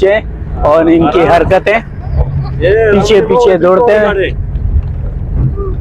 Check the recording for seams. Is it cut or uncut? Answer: uncut